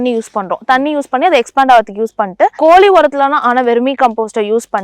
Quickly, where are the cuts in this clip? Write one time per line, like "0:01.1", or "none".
0:02.5